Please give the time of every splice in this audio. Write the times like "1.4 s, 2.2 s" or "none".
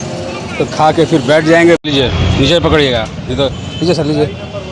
1.8 s